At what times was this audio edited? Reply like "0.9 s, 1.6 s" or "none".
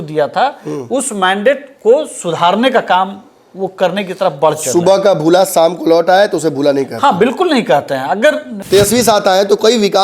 8.5 s